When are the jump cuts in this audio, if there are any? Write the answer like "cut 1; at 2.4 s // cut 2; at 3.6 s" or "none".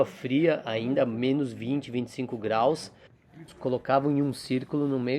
cut 1; at 3.4 s